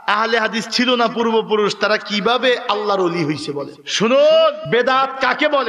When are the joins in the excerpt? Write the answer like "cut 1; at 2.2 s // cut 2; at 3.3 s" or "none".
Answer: none